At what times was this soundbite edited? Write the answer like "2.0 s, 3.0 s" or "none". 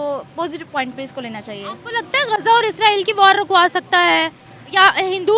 none